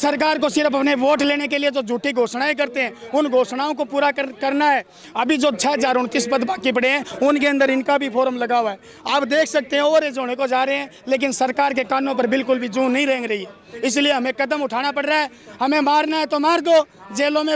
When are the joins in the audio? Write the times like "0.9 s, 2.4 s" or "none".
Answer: none